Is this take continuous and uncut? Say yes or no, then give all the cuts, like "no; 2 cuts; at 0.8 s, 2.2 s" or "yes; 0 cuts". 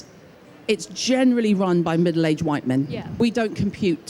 no; 1 cut; at 3.2 s